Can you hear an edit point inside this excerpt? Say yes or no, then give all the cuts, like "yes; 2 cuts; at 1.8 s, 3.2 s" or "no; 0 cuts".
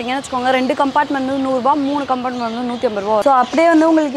yes; 1 cut; at 3.2 s